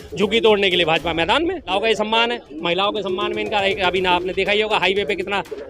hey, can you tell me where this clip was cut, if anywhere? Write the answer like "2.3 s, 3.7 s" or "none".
1.7 s